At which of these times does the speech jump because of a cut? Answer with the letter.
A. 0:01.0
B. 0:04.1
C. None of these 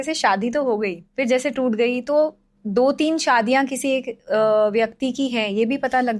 A